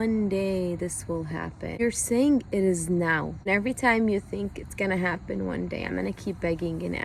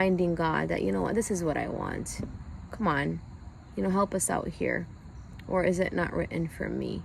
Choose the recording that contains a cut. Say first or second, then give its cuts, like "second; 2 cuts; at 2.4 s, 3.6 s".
first; 2 cuts; at 1.8 s, 3.4 s